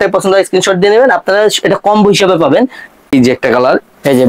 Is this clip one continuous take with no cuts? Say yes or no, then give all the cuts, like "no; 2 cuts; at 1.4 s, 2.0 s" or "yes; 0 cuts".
no; 1 cut; at 3.1 s